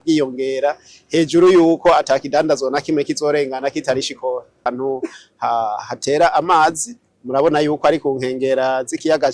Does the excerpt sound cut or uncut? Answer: cut